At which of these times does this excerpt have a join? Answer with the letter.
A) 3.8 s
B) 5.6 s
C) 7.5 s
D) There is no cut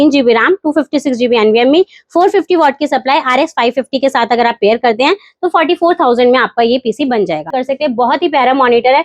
C